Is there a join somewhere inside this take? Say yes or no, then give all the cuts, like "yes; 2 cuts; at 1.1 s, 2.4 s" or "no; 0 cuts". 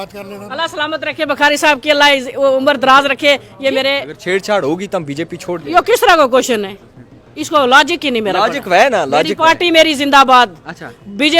yes; 1 cut; at 4.1 s